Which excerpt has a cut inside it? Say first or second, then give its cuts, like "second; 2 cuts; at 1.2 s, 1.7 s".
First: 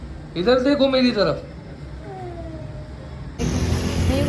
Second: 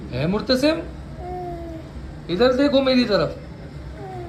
first; 1 cut; at 3.4 s